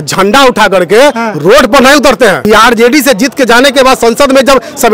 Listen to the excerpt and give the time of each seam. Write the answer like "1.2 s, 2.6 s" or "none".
2.4 s